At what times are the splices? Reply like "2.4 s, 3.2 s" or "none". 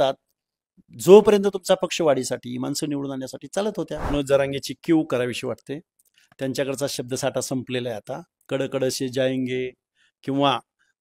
4.1 s